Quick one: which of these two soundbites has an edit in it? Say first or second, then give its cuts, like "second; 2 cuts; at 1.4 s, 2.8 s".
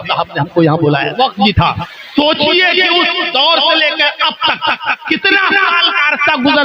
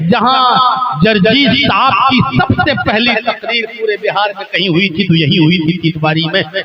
first; 2 cuts; at 1.2 s, 1.8 s